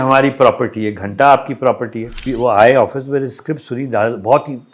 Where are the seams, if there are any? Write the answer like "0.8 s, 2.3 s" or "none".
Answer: 2.2 s

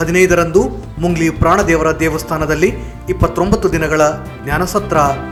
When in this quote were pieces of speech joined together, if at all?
none

